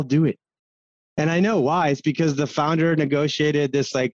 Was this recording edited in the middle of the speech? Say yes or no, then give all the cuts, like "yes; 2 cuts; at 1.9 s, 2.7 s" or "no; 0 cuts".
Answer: no; 0 cuts